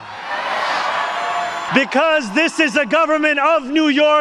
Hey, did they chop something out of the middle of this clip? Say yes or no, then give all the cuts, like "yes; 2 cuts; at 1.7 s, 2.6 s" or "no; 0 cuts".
yes; 1 cut; at 1.7 s